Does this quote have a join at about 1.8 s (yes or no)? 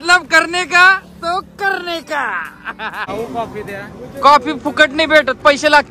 no